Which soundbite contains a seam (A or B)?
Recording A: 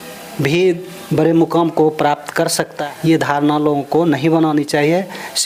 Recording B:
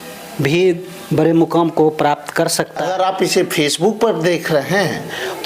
B